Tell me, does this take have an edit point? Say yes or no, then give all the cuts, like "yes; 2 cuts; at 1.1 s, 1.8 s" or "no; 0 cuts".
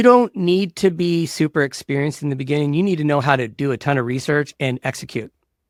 no; 0 cuts